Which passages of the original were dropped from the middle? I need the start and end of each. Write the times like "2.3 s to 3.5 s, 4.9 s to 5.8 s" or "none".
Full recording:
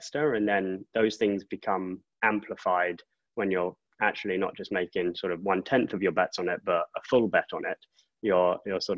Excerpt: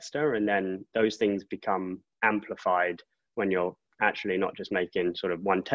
none